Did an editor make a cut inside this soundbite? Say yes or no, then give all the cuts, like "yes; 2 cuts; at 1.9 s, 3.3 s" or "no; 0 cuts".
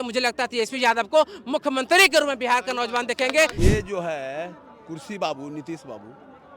yes; 1 cut; at 3.5 s